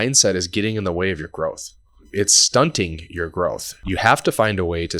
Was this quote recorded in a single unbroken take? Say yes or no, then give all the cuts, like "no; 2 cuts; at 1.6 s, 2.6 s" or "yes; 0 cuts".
no; 1 cut; at 3.8 s